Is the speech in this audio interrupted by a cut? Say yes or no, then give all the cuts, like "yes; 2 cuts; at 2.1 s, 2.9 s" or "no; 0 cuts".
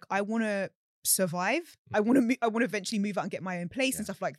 no; 0 cuts